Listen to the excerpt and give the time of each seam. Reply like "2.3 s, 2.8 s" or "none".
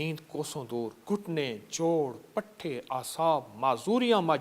1.0 s